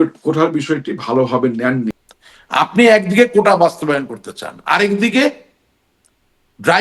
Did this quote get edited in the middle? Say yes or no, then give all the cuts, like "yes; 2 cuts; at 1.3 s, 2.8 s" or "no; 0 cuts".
yes; 1 cut; at 2.0 s